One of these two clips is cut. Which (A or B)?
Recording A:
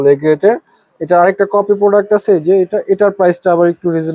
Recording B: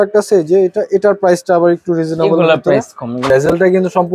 B